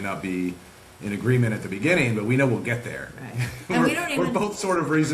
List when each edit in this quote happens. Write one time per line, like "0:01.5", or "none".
none